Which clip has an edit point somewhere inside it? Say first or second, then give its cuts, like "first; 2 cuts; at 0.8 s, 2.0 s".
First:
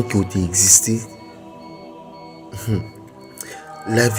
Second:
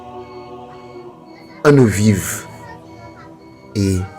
second; 1 cut; at 1.6 s